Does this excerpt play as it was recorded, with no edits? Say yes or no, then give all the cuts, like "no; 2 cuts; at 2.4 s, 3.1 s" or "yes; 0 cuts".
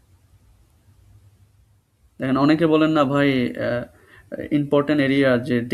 no; 1 cut; at 2.0 s